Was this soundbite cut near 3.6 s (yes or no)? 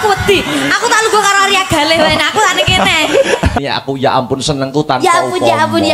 yes